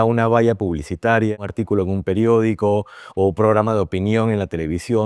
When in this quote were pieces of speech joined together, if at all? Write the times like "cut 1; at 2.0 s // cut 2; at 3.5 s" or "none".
cut 1; at 1.4 s